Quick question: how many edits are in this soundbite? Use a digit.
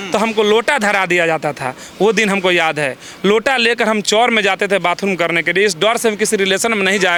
0